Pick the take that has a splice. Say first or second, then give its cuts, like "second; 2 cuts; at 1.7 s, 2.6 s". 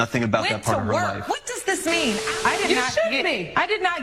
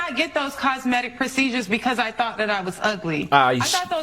first; 1 cut; at 2.3 s